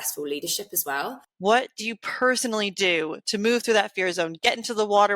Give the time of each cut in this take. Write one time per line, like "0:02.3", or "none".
0:01.2